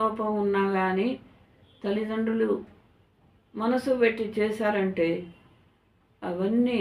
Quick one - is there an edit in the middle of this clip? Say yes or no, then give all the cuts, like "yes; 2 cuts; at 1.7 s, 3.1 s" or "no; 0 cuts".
no; 0 cuts